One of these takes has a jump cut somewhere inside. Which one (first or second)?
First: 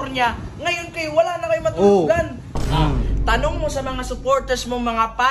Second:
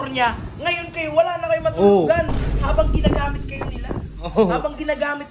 first